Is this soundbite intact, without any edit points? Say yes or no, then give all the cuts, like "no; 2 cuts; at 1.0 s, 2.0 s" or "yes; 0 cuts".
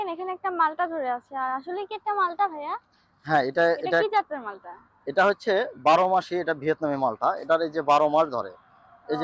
yes; 0 cuts